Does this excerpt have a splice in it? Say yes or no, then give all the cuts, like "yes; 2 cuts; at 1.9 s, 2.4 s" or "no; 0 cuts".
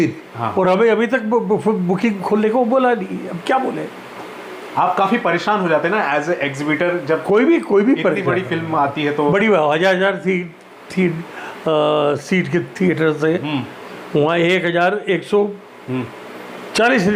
no; 0 cuts